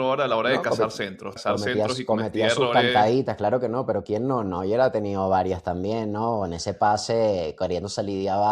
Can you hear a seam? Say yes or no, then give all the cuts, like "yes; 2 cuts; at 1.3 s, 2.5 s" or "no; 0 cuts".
yes; 1 cut; at 1.3 s